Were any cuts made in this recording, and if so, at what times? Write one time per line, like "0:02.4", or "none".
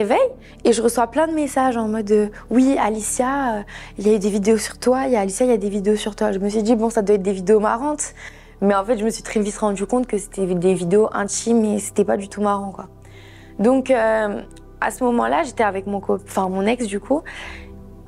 none